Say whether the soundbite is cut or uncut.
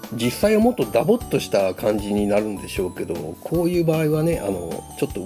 uncut